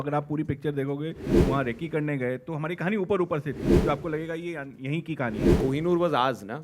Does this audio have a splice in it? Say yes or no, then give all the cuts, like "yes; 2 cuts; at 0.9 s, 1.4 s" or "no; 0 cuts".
yes; 3 cuts; at 1.3 s, 3.7 s, 5.5 s